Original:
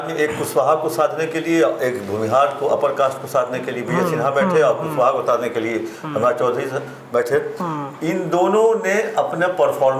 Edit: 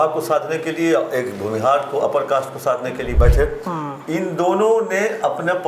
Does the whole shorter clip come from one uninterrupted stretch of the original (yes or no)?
no